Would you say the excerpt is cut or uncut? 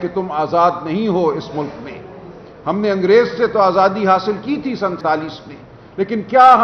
cut